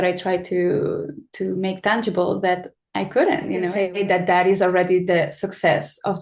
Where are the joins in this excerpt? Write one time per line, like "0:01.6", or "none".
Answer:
0:03.7